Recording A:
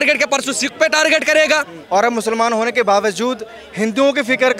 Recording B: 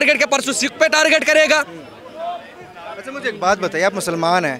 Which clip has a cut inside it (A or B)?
A